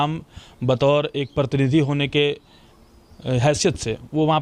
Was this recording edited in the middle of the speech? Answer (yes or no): no